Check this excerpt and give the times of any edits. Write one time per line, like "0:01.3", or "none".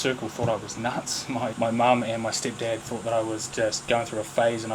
0:01.5

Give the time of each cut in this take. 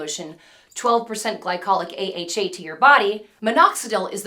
0:03.3

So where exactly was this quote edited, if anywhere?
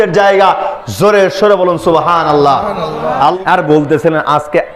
0:03.2

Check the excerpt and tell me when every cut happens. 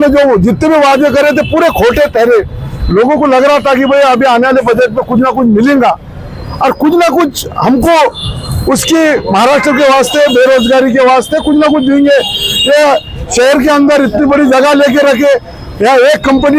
none

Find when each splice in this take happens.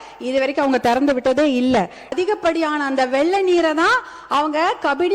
0:02.1

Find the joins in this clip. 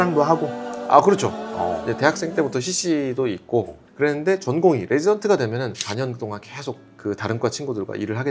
0:03.8
0:05.8

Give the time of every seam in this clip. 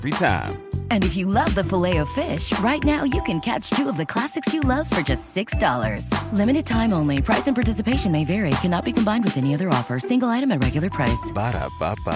none

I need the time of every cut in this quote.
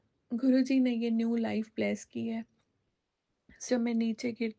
0:03.7

